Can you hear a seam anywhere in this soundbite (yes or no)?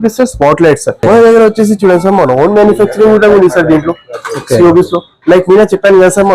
yes